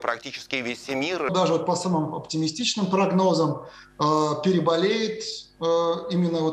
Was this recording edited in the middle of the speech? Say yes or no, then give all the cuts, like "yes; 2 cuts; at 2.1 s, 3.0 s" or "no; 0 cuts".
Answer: yes; 1 cut; at 1.3 s